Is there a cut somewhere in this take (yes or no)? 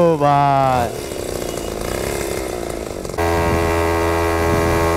yes